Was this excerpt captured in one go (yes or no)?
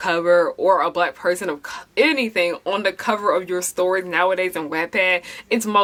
yes